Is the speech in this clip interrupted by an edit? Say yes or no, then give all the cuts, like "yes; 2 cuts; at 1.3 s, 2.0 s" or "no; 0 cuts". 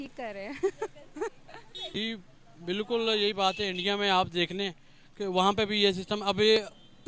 yes; 1 cut; at 1.7 s